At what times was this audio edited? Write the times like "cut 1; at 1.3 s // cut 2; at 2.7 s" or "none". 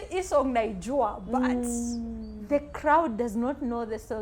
none

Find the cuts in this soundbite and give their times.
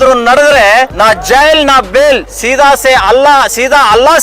cut 1; at 0.9 s // cut 2; at 2.4 s

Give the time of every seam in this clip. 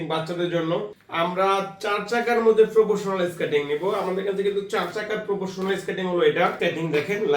cut 1; at 1.0 s // cut 2; at 6.6 s

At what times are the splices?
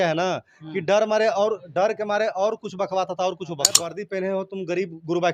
cut 1; at 3.8 s

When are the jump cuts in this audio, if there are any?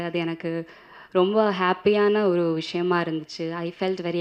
none

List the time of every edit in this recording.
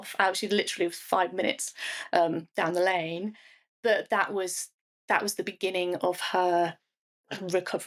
none

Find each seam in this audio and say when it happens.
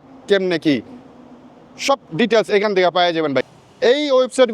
cut 1; at 3.5 s

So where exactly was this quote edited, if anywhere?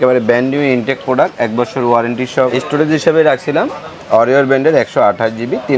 cut 1; at 2.5 s

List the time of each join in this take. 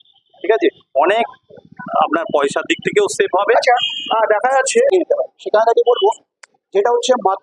cut 1; at 4.9 s

